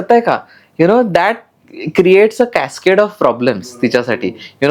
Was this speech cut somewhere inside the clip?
no; 0 cuts

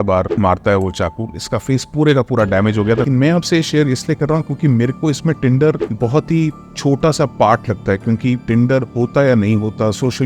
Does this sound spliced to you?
yes; 2 cuts; at 3.1 s, 5.9 s

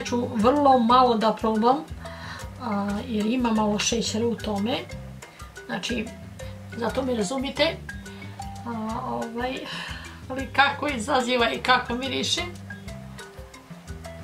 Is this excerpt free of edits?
no; 1 cut; at 12.5 s

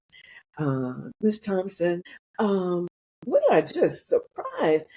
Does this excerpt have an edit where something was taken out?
yes; 3 cuts; at 1.2 s, 2.2 s, 3.7 s

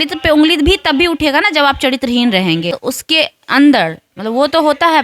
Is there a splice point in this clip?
yes; 1 cut; at 2.8 s

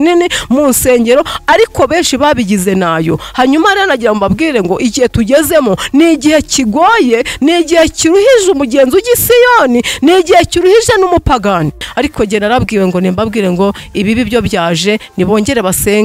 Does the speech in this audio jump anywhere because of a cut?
yes; 1 cut; at 11.9 s

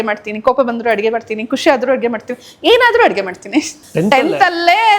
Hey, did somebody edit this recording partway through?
yes; 1 cut; at 3.8 s

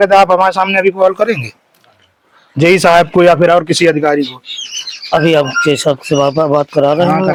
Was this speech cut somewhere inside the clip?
no; 0 cuts

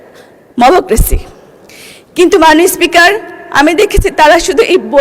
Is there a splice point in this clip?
yes; 1 cut; at 1.3 s

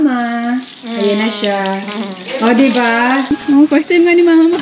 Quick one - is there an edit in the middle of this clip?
yes; 1 cut; at 3.3 s

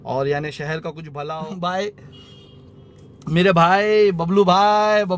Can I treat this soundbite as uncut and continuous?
no; 1 cut; at 1.0 s

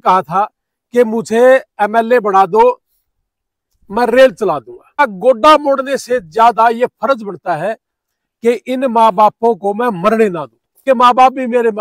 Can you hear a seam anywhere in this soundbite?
yes; 2 cuts; at 5.0 s, 10.8 s

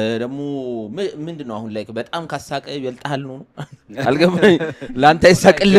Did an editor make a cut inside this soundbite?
no; 0 cuts

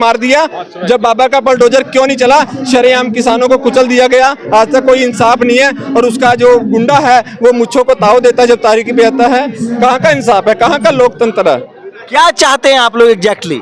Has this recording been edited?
no; 0 cuts

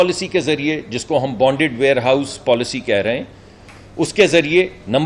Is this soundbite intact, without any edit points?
no; 1 cut; at 1.3 s

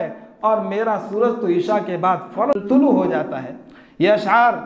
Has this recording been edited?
yes; 1 cut; at 2.6 s

